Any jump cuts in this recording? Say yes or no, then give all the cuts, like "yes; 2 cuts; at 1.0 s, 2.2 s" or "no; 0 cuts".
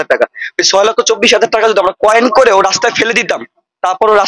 no; 0 cuts